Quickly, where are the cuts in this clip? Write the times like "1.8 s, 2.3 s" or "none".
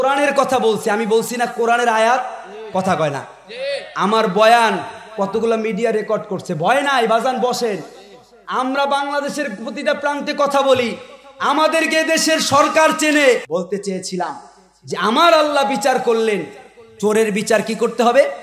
13.5 s